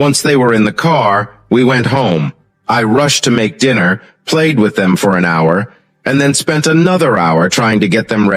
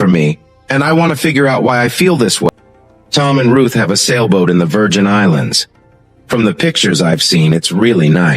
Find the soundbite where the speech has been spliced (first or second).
second